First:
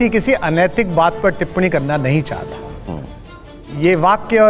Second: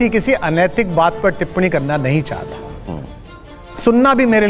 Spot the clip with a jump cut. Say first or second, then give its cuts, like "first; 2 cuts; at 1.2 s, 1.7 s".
second; 1 cut; at 3.5 s